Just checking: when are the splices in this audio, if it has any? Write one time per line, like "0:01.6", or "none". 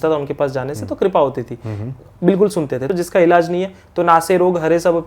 0:02.9